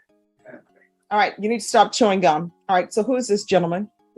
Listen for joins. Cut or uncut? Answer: cut